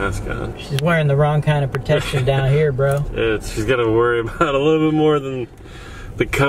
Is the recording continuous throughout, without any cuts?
yes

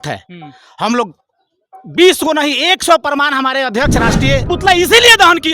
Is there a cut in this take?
yes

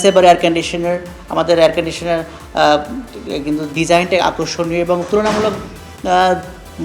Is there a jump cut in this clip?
yes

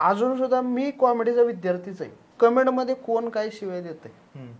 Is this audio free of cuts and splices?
no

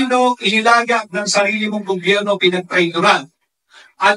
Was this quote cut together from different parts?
no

